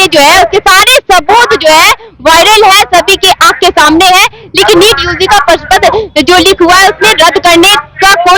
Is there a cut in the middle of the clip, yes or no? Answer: no